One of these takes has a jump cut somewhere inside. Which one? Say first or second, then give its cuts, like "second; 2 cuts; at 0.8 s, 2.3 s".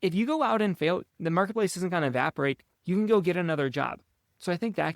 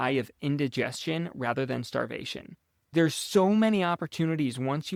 first; 1 cut; at 1.1 s